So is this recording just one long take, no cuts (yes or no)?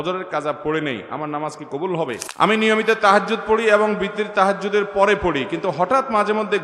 no